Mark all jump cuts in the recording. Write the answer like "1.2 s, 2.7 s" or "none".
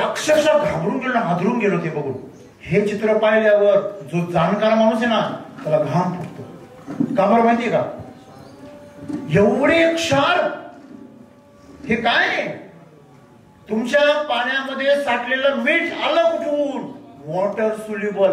none

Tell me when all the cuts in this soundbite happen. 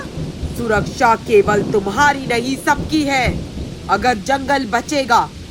none

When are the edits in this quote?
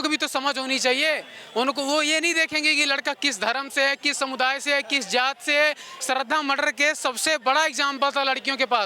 5.9 s

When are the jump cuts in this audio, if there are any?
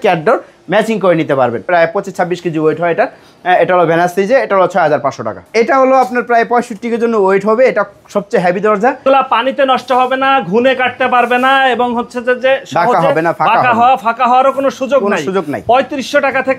1.6 s, 5.5 s, 9.0 s

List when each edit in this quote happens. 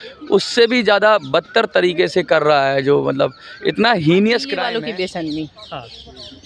4.6 s

